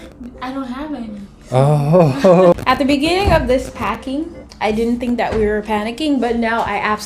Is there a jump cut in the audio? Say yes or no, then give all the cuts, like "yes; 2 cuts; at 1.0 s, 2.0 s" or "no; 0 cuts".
yes; 1 cut; at 2.5 s